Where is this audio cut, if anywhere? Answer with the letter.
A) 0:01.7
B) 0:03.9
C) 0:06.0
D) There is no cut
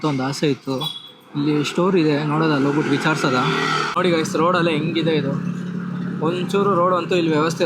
B